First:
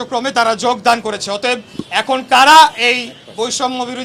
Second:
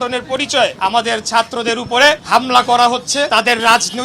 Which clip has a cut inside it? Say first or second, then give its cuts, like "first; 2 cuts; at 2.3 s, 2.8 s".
second; 3 cuts; at 0.8 s, 2.2 s, 3.3 s